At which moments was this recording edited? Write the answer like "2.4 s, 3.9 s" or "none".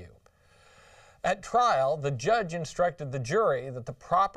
none